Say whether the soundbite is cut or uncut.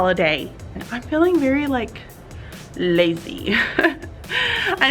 cut